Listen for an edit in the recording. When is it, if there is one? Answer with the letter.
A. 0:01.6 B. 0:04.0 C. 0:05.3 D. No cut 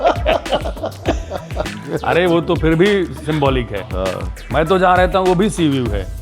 A